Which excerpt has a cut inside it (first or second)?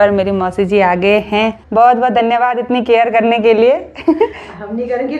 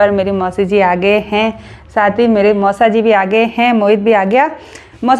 first